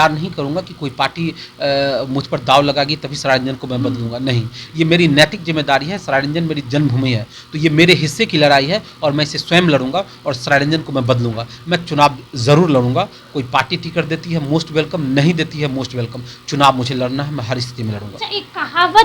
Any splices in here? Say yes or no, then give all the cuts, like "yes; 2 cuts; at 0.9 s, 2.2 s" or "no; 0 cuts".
no; 0 cuts